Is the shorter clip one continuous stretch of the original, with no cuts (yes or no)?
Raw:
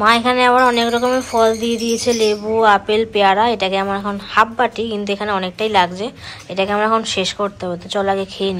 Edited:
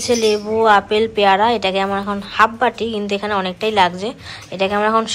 yes